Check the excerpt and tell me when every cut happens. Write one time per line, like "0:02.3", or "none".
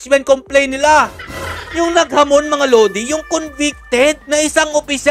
none

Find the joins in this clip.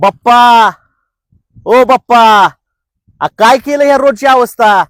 none

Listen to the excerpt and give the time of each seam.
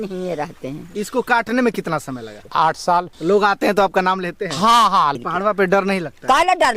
0:00.9
0:02.3
0:03.1
0:05.2

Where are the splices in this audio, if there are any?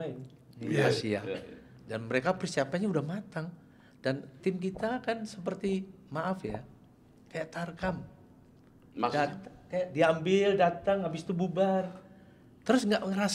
none

